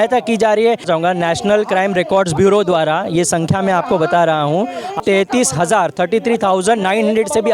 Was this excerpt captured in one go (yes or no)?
no